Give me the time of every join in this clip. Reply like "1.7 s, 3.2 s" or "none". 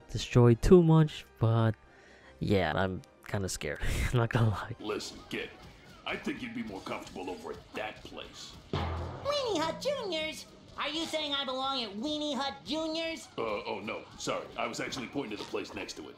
2.7 s, 4.7 s